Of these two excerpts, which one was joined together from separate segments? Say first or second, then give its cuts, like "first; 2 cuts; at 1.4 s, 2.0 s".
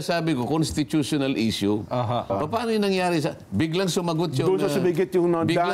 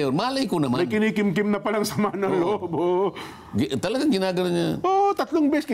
first; 1 cut; at 2.3 s